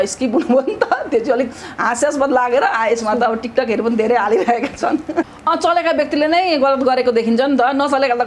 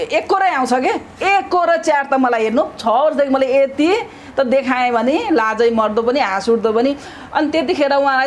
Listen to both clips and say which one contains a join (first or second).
first